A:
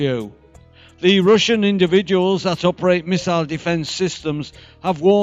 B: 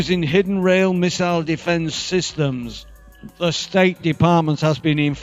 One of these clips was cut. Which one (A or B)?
A